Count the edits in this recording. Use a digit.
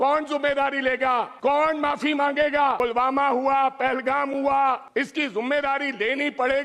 3